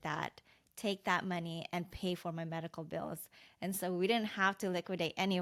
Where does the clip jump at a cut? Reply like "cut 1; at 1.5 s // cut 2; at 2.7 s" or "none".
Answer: none